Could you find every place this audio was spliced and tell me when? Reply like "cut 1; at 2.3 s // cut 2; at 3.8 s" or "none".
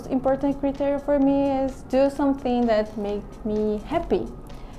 none

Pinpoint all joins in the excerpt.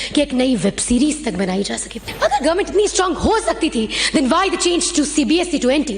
cut 1; at 2.0 s

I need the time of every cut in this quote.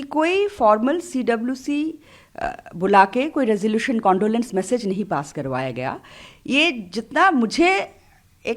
none

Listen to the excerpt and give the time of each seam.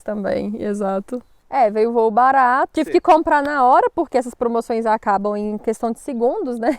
cut 1; at 1.3 s

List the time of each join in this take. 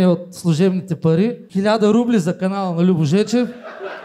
cut 1; at 1.4 s

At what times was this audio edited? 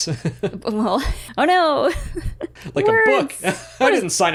none

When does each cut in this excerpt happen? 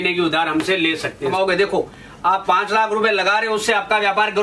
cut 1; at 1.3 s

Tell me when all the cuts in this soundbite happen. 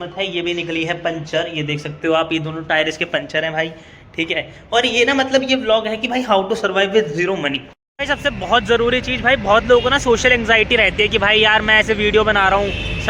cut 1; at 7.7 s

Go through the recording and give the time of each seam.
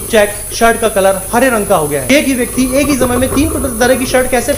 cut 1; at 2.1 s

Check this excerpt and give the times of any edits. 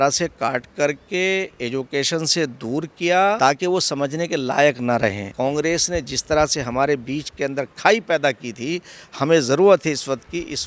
cut 1; at 3.4 s // cut 2; at 5.2 s

